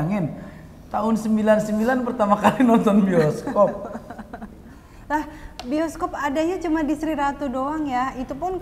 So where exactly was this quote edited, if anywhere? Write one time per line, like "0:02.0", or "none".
none